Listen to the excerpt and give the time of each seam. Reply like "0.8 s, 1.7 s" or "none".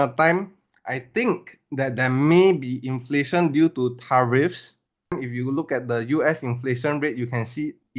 5.2 s